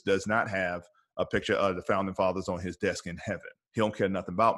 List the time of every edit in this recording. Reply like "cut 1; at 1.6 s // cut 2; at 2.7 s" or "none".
cut 1; at 3.5 s